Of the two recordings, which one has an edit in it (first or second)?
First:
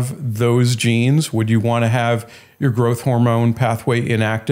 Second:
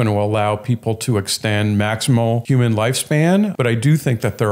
second